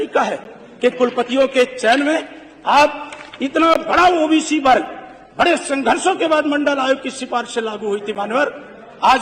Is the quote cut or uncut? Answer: uncut